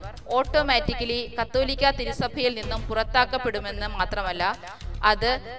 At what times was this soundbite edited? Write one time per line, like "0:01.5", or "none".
none